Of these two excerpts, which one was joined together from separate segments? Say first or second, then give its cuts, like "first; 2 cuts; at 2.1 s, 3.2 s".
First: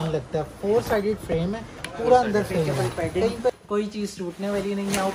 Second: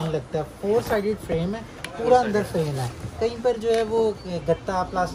first; 1 cut; at 3.5 s